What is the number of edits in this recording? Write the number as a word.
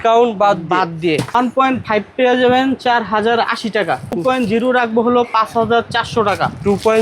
two